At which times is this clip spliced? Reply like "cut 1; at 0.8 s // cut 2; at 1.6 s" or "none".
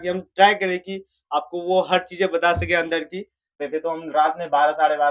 cut 1; at 3.6 s